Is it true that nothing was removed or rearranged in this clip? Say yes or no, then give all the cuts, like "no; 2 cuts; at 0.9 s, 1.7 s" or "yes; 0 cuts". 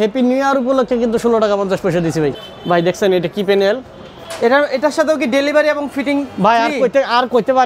no; 2 cuts; at 2.3 s, 4.2 s